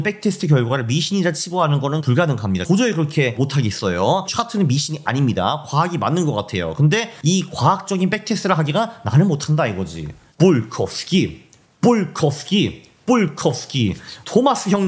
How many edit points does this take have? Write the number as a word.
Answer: two